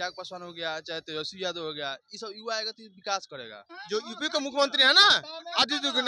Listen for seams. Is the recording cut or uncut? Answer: cut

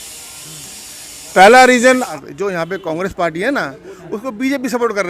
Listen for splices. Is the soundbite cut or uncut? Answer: cut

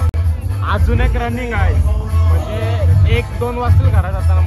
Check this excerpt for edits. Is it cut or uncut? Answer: uncut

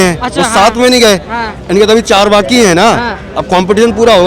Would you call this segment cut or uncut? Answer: uncut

